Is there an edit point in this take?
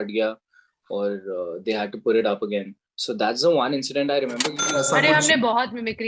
yes; 1 cut; at 4.6 s

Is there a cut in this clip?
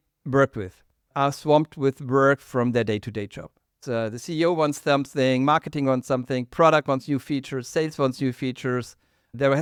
no; 0 cuts

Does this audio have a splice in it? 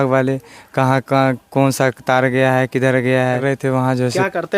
yes; 1 cut; at 3.4 s

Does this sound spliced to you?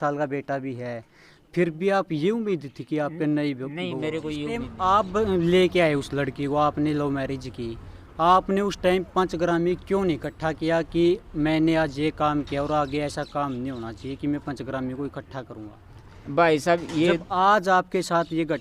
yes; 1 cut; at 4.7 s

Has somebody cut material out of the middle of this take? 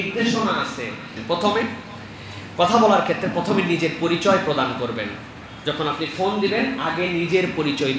yes; 1 cut; at 1.1 s

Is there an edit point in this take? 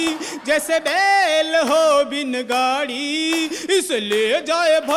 no; 0 cuts

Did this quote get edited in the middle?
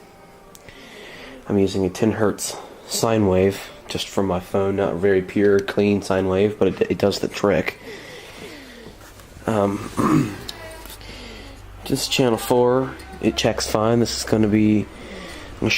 yes; 1 cut; at 1.7 s

